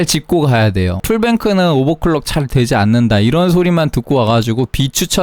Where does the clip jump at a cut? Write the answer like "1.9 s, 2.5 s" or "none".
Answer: 1.0 s